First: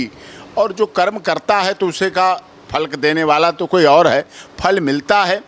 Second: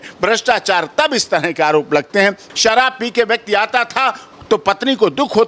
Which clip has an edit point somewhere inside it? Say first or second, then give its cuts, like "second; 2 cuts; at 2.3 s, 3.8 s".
second; 1 cut; at 2.4 s